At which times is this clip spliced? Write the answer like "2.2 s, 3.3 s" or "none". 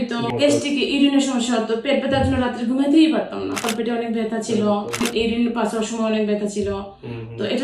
3.6 s, 4.9 s